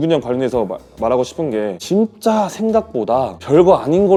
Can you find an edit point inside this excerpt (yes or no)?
no